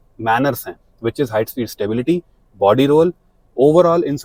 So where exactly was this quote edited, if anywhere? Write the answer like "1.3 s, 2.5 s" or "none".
none